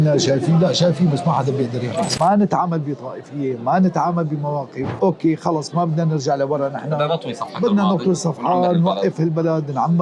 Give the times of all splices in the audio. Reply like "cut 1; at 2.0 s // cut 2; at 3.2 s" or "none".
cut 1; at 2.1 s // cut 2; at 4.8 s